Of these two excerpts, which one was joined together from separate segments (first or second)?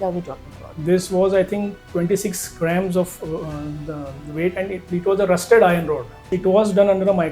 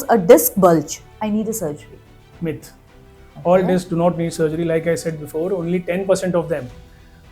first